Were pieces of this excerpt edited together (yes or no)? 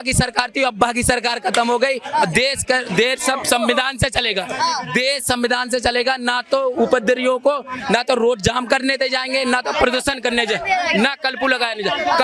no